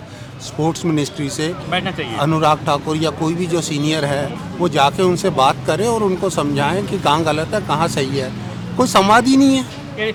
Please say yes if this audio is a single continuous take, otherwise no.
yes